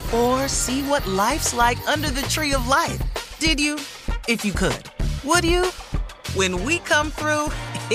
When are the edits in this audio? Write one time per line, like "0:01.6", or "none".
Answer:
none